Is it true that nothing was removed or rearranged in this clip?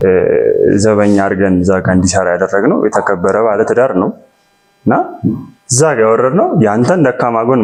yes; 0 cuts

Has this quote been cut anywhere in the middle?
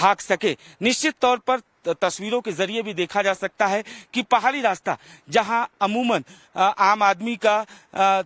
yes; 1 cut; at 7.3 s

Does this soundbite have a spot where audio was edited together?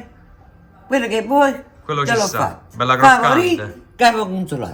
no; 0 cuts

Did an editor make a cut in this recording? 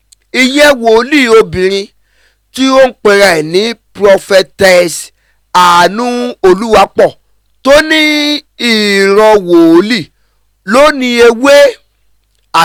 no; 0 cuts

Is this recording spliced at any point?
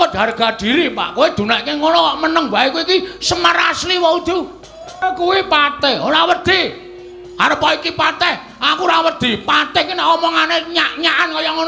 yes; 1 cut; at 5.0 s

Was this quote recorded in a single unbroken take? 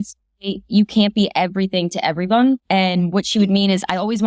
no; 1 cut; at 2.6 s

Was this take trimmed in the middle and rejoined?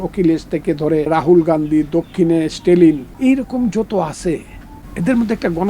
yes; 2 cuts; at 1.1 s, 3.1 s

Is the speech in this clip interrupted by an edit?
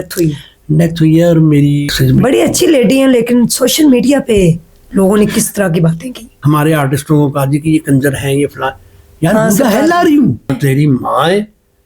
yes; 3 cuts; at 2.0 s, 6.3 s, 10.6 s

